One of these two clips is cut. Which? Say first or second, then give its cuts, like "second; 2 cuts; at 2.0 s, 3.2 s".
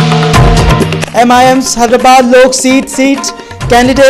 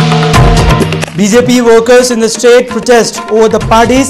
first; 1 cut; at 0.9 s